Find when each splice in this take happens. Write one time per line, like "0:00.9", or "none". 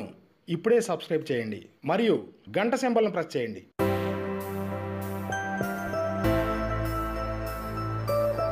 none